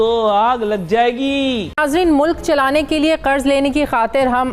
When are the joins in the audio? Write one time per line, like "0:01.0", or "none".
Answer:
0:01.7